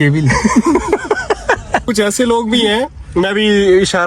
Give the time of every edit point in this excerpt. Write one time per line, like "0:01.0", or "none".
0:01.9